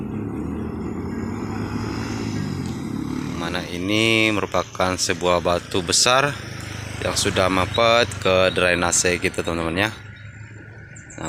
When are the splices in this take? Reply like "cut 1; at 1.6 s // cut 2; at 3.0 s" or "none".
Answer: cut 1; at 3.0 s